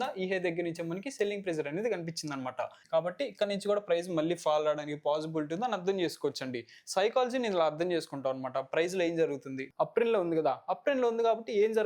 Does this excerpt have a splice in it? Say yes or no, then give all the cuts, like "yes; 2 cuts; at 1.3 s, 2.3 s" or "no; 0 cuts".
yes; 2 cuts; at 2.8 s, 9.6 s